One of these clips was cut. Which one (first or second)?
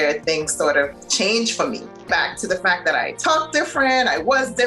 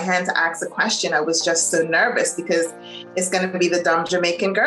first